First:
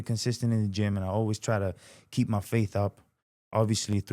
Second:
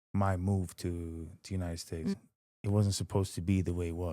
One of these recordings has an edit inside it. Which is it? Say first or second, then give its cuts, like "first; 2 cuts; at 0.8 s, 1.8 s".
second; 1 cut; at 2.2 s